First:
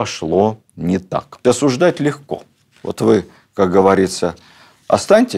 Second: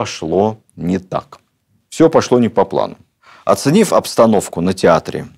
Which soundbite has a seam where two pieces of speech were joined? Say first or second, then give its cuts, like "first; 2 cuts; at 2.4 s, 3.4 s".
first; 1 cut; at 1.3 s